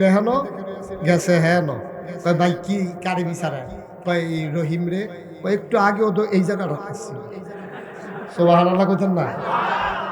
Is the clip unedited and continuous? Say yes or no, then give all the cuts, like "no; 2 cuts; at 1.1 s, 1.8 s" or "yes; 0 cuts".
yes; 0 cuts